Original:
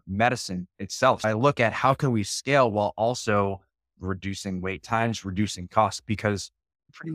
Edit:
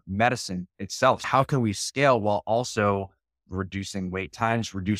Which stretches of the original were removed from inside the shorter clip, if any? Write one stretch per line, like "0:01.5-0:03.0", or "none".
0:01.2-0:01.7